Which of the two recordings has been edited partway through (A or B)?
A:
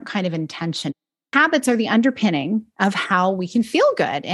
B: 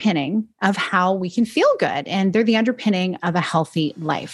A